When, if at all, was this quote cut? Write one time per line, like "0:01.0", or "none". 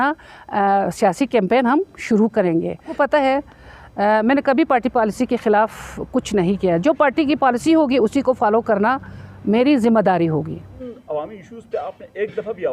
0:02.9
0:10.8

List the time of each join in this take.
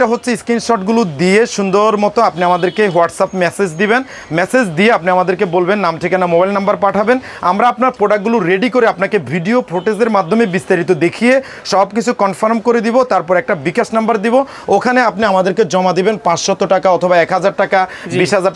none

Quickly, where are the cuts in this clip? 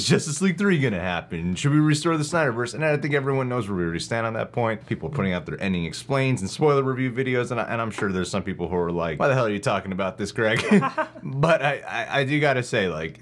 0:04.8
0:09.1

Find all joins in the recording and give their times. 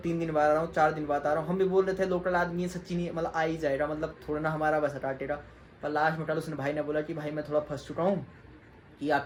none

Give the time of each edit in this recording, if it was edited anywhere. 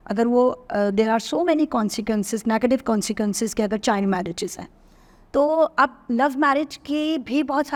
none

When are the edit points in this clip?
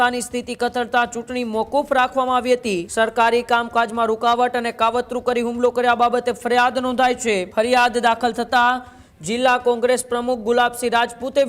0:02.8
0:07.5

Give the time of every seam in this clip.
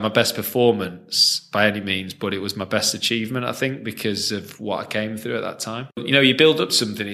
0:06.0

